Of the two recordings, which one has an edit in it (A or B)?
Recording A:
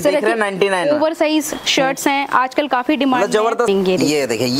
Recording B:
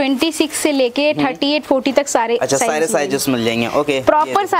A